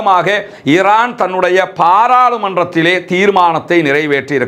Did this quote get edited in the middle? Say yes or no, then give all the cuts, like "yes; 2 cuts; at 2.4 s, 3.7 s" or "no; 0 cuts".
no; 0 cuts